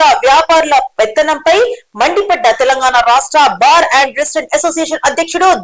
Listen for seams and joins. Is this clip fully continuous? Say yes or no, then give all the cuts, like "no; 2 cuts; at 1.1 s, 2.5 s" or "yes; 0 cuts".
yes; 0 cuts